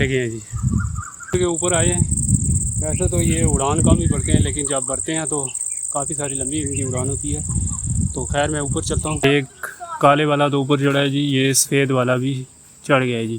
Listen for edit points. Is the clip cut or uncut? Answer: cut